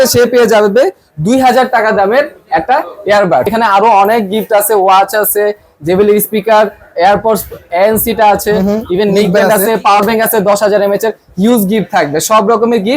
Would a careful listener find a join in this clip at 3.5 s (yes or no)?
yes